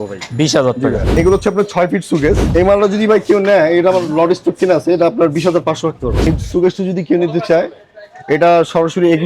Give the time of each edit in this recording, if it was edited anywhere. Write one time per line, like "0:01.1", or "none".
0:01.1
0:02.4
0:06.3